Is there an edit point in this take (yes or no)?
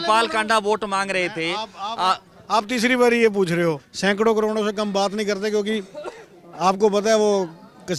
yes